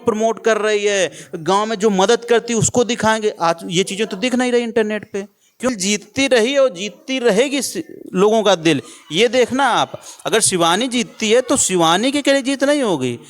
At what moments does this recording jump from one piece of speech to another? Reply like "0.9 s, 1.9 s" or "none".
5.7 s